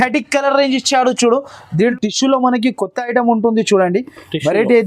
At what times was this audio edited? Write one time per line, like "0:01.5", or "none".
0:01.6